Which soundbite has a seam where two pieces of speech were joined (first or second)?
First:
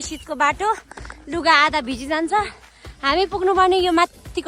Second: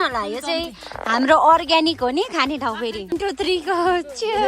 second